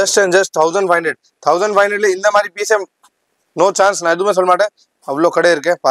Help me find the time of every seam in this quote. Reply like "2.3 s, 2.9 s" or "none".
none